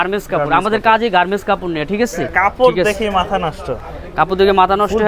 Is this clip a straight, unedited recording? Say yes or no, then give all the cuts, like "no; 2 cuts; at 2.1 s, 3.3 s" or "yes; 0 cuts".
no; 1 cut; at 2.3 s